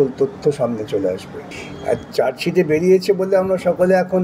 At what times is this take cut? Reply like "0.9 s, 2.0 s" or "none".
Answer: none